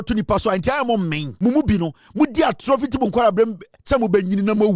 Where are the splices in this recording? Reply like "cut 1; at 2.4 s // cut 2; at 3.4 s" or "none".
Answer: cut 1; at 1.2 s

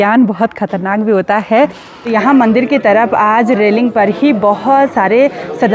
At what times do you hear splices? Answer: cut 1; at 1.9 s

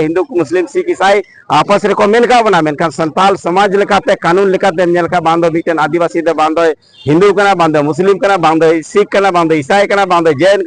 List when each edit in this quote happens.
none

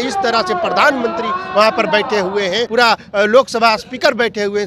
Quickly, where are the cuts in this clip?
cut 1; at 2.6 s

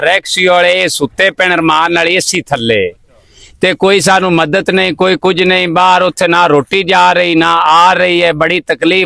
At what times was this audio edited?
none

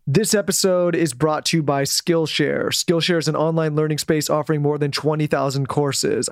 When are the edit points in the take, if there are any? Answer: none

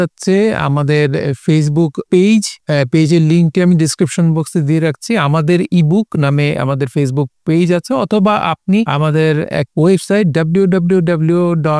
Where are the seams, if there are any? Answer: cut 1; at 2.0 s // cut 2; at 2.6 s // cut 3; at 9.4 s

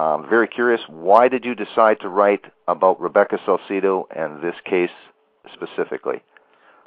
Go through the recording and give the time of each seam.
cut 1; at 1.8 s

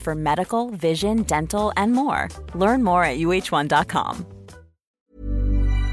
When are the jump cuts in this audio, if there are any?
cut 1; at 5.0 s

